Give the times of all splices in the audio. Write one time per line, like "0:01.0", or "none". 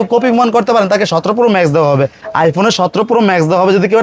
none